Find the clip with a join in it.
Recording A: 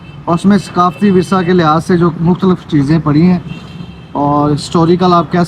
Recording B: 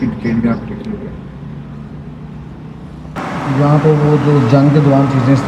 B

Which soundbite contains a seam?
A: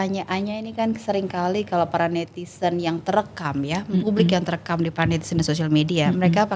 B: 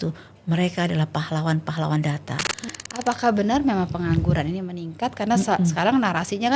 B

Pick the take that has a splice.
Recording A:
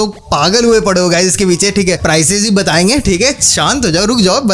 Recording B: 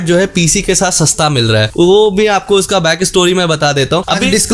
A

